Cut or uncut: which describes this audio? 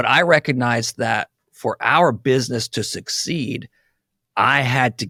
uncut